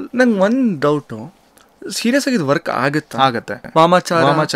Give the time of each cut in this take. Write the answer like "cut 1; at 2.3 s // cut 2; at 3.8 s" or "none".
cut 1; at 3.6 s